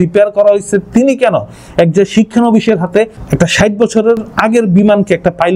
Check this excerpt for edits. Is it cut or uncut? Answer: cut